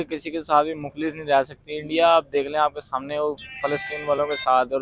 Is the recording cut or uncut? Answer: uncut